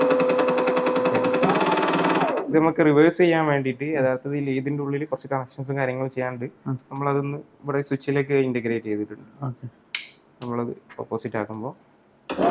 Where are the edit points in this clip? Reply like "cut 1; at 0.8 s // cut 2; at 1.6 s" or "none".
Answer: none